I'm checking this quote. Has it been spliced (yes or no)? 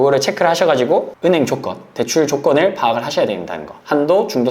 yes